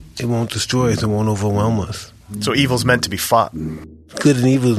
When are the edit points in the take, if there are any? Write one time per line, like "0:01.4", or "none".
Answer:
0:02.3
0:03.7